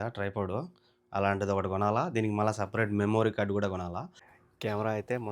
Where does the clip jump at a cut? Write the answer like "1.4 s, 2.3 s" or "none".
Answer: 4.3 s